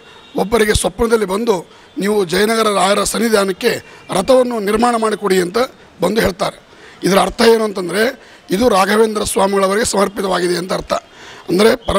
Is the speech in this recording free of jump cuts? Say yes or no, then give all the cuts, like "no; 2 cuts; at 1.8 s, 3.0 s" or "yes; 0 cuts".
yes; 0 cuts